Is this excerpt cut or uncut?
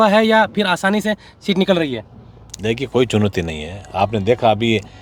uncut